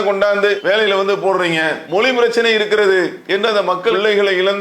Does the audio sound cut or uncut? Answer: cut